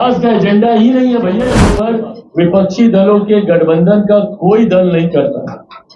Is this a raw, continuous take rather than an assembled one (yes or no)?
no